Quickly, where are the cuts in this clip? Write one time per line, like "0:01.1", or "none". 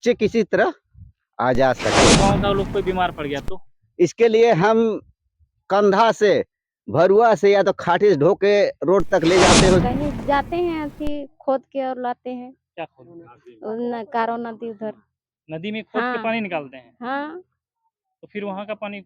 0:02.2
0:09.9